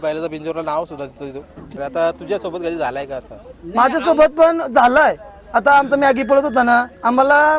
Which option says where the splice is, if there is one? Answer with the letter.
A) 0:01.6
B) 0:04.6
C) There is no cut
A